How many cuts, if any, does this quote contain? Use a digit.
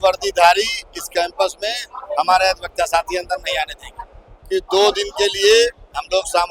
1